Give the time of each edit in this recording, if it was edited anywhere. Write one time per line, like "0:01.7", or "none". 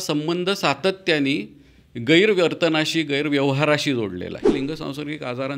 0:04.5